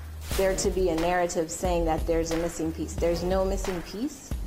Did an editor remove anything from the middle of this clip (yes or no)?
no